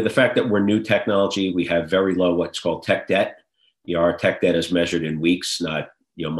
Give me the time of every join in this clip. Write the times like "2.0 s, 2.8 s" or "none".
none